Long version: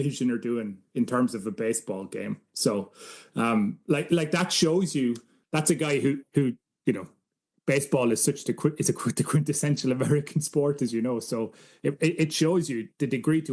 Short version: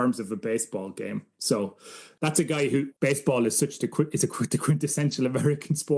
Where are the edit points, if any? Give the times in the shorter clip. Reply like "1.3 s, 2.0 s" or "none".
2.0 s, 2.9 s